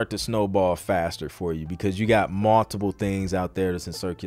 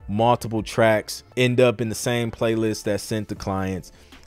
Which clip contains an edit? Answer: second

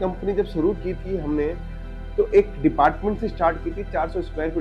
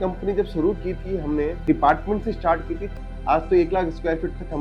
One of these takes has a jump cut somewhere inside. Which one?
second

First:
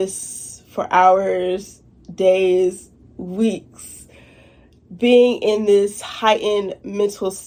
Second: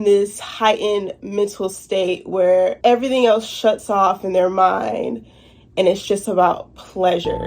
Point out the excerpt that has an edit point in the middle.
second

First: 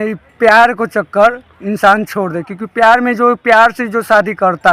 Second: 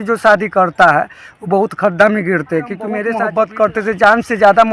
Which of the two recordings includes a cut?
second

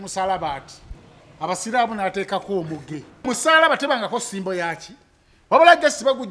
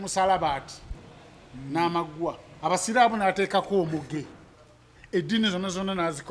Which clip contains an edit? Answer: first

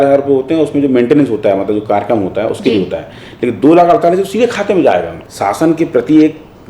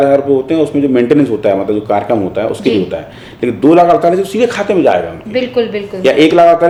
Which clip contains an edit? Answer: first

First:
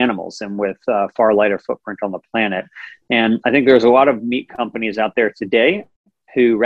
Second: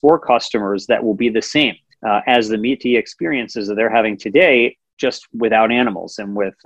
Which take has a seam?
second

